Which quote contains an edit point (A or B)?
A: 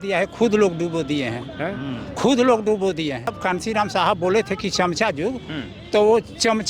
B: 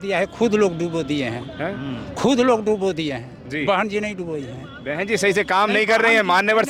A